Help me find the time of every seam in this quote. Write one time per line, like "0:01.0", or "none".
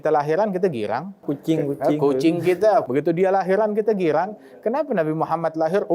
0:01.3